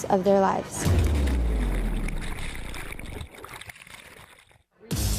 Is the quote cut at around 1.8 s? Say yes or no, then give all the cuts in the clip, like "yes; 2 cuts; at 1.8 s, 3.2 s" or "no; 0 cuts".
yes; 1 cut; at 1.8 s